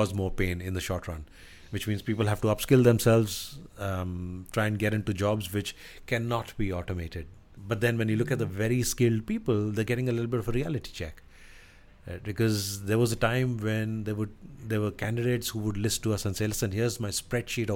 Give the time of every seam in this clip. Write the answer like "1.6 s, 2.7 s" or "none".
7.5 s

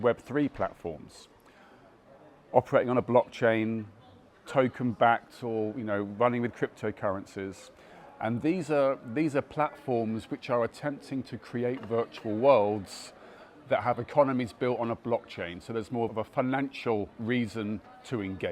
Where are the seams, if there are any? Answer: 16.1 s, 17.2 s

